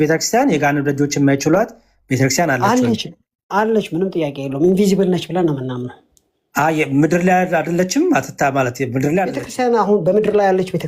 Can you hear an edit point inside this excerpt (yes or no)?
yes